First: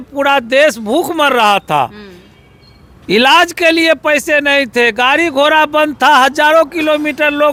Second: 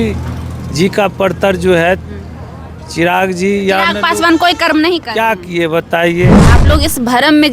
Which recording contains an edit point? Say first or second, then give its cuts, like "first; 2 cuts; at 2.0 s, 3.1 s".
second; 1 cut; at 6.5 s